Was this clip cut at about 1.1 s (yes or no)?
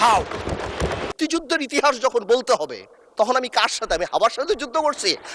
yes